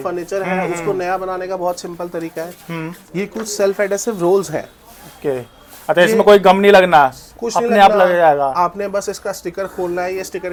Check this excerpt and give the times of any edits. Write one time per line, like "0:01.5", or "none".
none